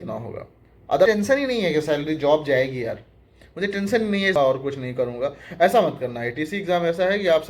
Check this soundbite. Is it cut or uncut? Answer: cut